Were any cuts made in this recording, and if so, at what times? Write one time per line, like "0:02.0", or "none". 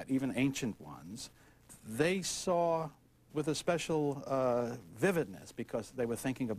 none

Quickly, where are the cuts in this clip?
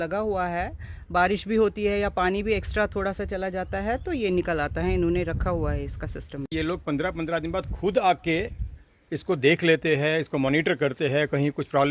0:06.5

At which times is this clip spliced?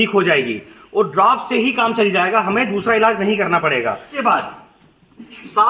0:04.1

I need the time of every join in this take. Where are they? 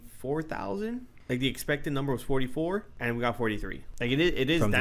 0:01.1
0:02.9
0:03.8

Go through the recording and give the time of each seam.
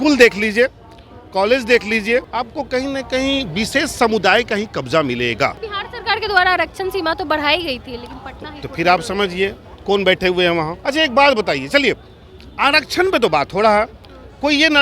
0:02.4
0:05.7
0:10.8

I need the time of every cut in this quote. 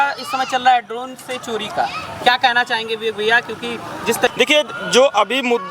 0:04.3

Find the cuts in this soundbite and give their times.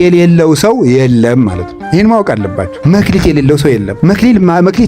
0:02.8
0:03.9

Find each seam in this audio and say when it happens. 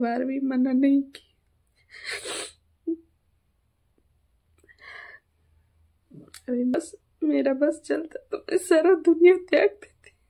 0:06.8

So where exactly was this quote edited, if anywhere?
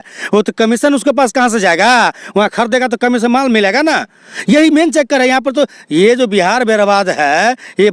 none

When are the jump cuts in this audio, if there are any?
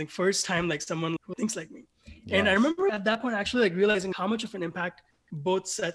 0:01.3
0:02.9
0:04.1

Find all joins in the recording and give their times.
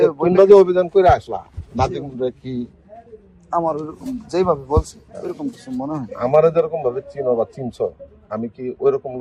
none

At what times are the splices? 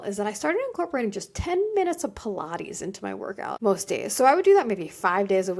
0:03.6

